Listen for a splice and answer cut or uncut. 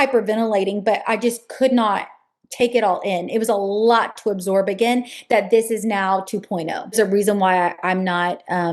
cut